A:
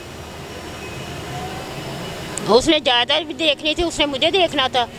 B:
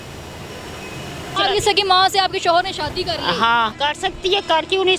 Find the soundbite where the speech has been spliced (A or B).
B